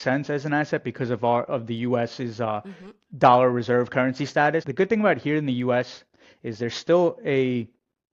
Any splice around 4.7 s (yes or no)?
yes